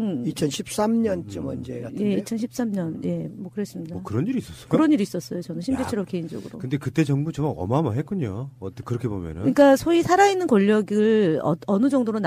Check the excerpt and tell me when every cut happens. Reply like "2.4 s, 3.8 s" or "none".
9.3 s